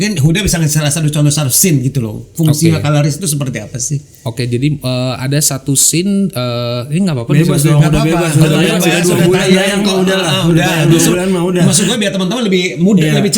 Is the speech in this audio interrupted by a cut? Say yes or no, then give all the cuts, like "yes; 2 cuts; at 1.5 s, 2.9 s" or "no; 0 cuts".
no; 0 cuts